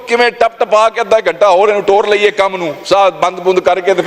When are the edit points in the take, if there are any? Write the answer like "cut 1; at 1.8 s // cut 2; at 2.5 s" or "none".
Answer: none